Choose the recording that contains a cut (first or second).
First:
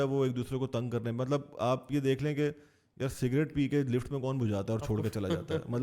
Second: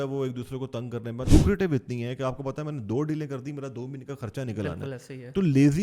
second